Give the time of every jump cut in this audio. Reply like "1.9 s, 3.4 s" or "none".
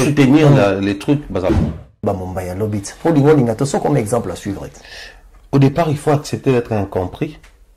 1.7 s